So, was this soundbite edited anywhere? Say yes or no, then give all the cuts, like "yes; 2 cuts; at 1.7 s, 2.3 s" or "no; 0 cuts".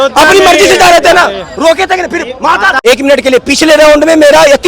yes; 1 cut; at 2.8 s